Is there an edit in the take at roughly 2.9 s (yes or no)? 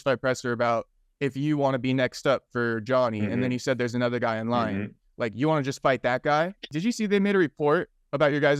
no